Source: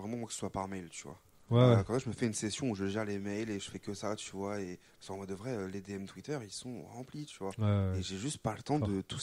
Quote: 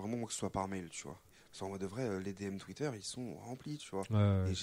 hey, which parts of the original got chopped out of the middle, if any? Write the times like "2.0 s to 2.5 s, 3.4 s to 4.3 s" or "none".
1.3 s to 4.8 s